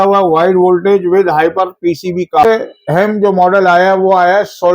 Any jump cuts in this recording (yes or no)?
yes